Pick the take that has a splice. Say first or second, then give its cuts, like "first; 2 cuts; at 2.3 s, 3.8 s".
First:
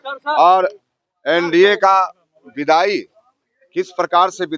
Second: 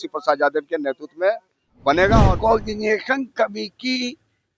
second; 1 cut; at 2.2 s